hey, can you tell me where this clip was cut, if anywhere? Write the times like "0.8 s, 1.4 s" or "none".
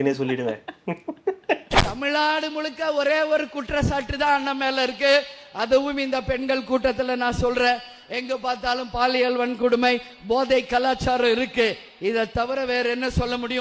1.8 s